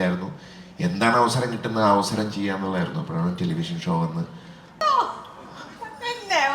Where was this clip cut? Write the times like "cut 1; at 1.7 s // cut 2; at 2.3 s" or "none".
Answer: cut 1; at 4.8 s